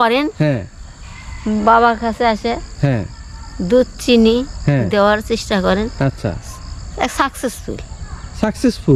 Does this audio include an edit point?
no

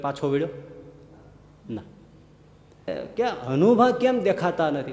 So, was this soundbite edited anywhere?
yes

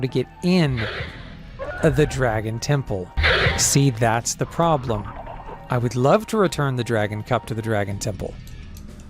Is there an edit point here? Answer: yes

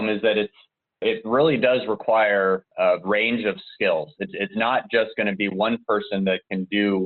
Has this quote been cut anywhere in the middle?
yes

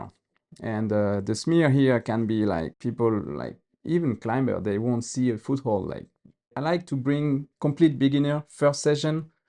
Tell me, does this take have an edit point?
yes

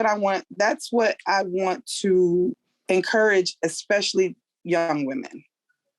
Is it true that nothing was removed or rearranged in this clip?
no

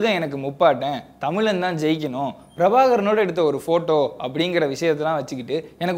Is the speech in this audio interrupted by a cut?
no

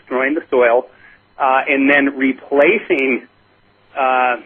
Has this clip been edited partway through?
no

